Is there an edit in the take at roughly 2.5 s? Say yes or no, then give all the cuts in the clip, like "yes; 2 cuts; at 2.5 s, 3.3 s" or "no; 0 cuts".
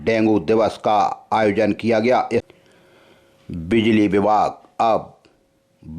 yes; 1 cut; at 2.5 s